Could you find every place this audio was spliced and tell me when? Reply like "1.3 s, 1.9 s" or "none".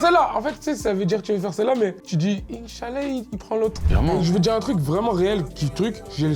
3.9 s

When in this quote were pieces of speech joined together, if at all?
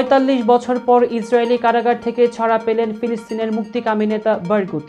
none

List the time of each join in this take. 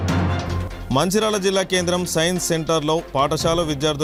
none

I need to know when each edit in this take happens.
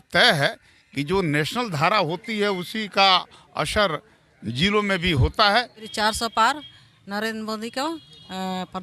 5.9 s

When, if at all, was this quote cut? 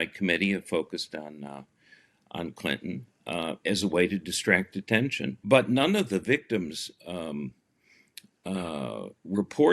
5.3 s

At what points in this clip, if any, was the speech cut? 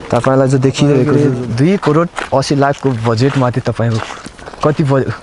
1.1 s

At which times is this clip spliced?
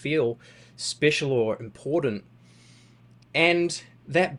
none

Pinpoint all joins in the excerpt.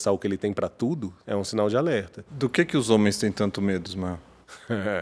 1.1 s

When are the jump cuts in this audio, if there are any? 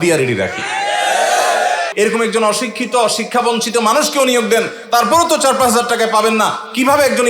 1.9 s

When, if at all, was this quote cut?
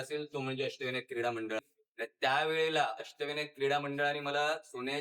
1.6 s

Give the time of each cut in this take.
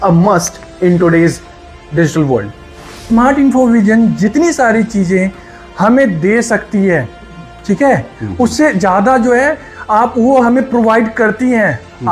3.1 s

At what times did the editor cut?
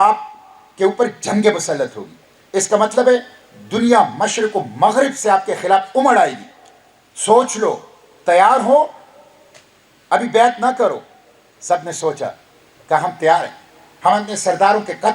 none

